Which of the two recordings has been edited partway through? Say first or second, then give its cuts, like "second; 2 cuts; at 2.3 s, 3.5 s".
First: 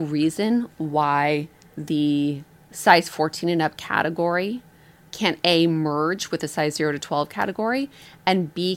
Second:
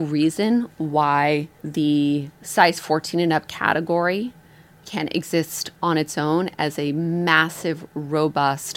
second; 3 cuts; at 1.6 s, 2.4 s, 4.9 s